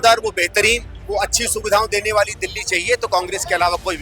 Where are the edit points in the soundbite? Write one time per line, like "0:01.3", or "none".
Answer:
0:00.9